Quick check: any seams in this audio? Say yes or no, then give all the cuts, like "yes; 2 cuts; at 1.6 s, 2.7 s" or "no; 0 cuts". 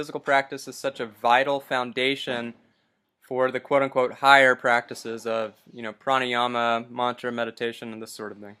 yes; 1 cut; at 1.1 s